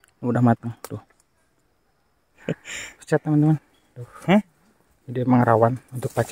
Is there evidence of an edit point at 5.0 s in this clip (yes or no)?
no